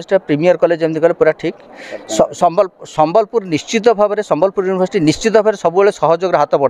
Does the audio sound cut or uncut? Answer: uncut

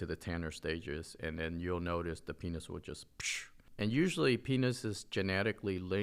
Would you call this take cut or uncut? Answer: cut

